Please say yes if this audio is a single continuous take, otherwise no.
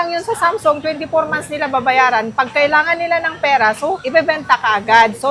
yes